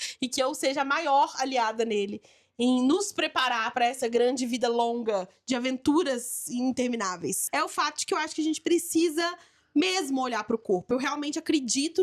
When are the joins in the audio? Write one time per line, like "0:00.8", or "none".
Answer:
0:07.4